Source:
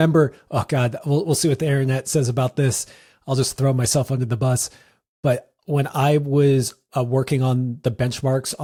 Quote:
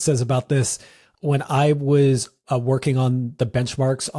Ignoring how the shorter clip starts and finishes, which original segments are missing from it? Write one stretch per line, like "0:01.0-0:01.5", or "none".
0:03.1-0:05.5